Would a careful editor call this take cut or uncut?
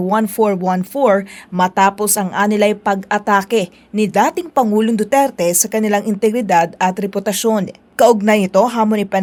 uncut